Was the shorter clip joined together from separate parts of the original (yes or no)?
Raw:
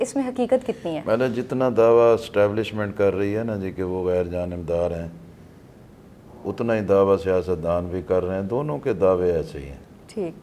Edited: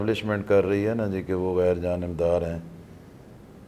no